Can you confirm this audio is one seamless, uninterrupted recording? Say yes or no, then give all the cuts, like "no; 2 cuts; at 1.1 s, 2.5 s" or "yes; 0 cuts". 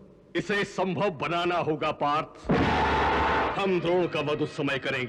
no; 1 cut; at 3.5 s